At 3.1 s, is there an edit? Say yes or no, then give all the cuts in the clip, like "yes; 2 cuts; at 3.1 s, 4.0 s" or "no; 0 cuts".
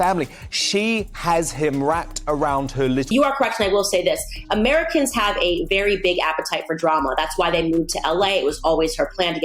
yes; 1 cut; at 3.1 s